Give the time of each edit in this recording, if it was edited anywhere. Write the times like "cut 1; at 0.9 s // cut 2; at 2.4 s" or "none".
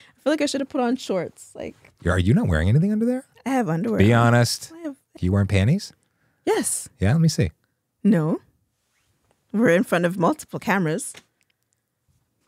cut 1; at 5.1 s